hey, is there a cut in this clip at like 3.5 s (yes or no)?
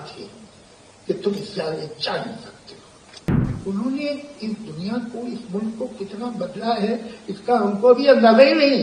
yes